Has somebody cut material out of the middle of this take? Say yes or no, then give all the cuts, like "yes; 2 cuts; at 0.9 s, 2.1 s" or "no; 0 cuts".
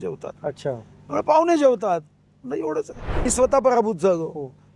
yes; 1 cut; at 3.3 s